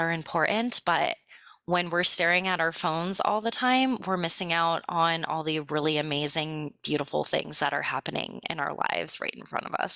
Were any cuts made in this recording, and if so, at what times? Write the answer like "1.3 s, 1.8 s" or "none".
none